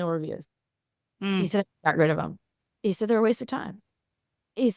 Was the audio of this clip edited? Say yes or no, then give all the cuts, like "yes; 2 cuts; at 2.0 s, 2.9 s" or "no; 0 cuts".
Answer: no; 0 cuts